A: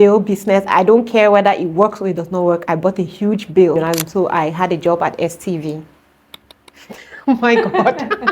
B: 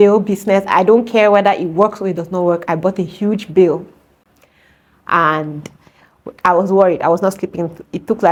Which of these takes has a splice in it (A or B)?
A